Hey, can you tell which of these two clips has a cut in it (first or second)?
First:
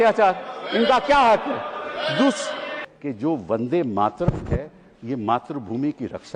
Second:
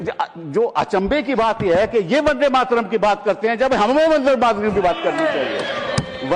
first